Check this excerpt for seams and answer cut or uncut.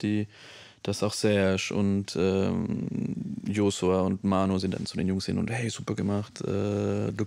uncut